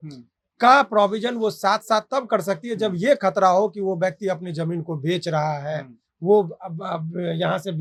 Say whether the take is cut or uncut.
uncut